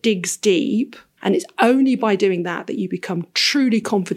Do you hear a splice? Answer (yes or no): yes